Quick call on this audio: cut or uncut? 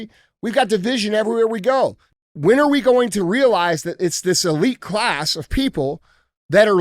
cut